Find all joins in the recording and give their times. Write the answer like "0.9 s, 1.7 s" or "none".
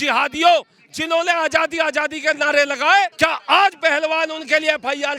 3.1 s